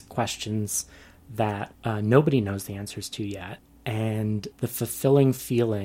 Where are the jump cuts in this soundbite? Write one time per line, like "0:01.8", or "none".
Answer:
0:01.7
0:03.7
0:04.5

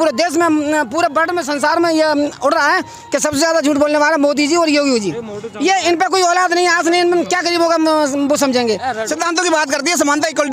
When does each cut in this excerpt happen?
0:09.0

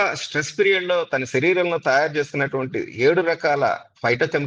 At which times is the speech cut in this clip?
none

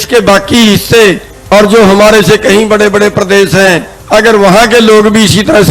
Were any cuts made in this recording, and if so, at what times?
0:01.3
0:03.9

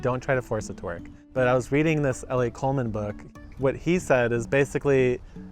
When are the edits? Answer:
0:01.1
0:03.2

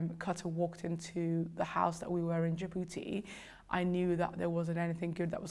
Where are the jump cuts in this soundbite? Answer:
none

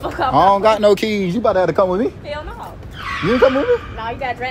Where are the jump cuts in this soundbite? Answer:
none

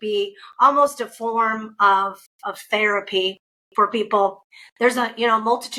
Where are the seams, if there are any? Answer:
none

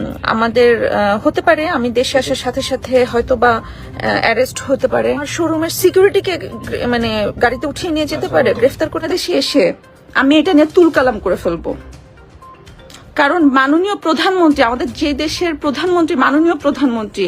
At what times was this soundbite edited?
0:05.3
0:09.1

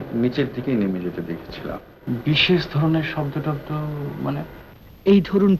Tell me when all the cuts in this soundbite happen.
0:01.9

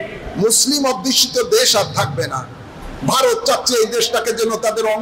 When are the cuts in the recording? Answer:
none

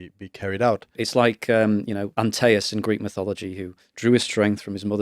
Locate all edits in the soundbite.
0:01.0
0:02.1

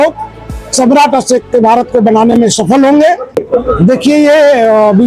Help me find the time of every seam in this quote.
0:03.4

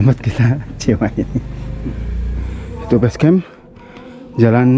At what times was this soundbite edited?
0:02.8

